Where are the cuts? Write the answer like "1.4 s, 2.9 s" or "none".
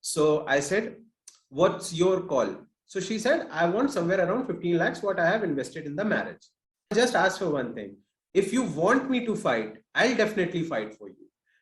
6.9 s